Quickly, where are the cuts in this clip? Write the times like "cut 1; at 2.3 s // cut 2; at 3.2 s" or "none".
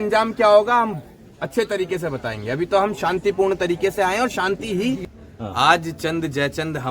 cut 1; at 5.1 s